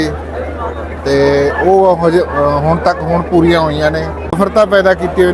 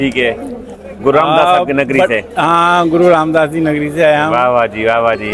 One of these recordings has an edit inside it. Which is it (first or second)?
first